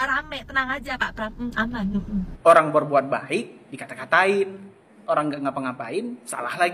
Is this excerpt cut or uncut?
cut